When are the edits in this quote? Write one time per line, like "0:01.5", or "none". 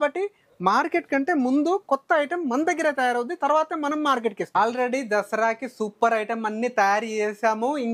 0:04.6